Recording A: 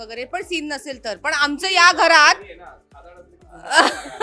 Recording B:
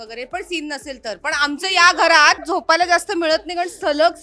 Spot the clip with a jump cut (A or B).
B